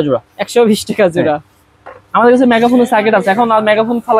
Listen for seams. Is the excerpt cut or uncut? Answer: uncut